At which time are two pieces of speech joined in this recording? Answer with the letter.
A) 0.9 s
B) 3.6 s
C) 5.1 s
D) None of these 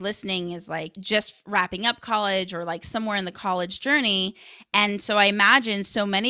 A